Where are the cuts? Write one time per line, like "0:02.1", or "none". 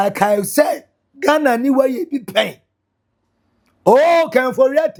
none

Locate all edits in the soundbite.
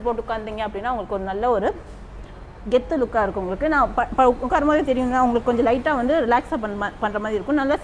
none

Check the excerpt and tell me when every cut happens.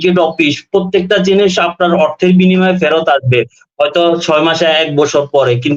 none

